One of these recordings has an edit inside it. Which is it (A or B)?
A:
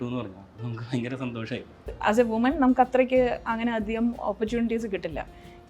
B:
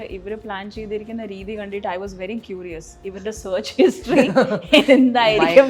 A